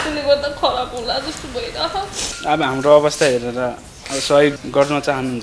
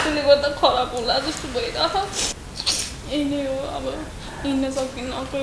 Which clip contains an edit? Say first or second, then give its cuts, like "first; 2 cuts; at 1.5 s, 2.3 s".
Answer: first; 1 cut; at 2.2 s